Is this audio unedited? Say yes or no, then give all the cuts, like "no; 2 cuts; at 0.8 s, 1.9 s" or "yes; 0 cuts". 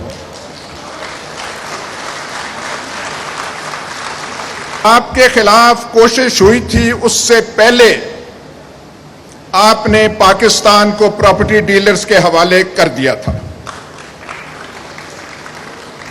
no; 1 cut; at 4.8 s